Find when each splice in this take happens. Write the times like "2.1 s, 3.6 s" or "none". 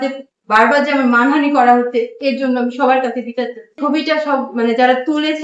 3.8 s